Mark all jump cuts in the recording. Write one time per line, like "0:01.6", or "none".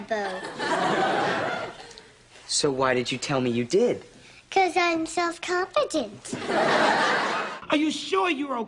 0:07.5